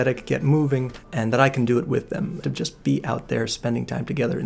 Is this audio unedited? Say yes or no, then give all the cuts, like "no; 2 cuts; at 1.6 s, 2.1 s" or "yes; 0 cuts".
no; 2 cuts; at 1.0 s, 2.4 s